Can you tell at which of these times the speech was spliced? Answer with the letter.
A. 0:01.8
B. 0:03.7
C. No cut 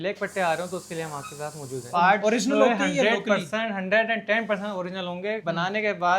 A